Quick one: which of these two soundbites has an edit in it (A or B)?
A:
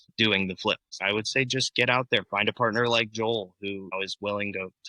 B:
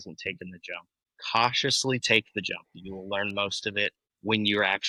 A